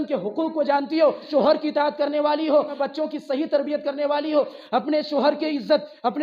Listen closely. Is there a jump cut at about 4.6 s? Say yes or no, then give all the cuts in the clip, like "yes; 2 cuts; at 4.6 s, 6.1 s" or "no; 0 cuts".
no; 2 cuts; at 1.2 s, 2.8 s